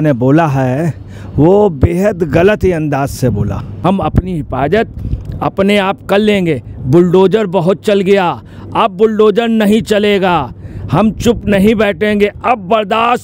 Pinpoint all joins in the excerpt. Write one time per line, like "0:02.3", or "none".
0:03.8